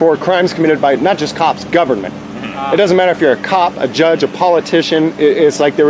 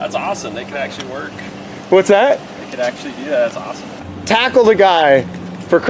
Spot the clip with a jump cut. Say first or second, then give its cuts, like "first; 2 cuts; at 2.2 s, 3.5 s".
second; 1 cut; at 4.0 s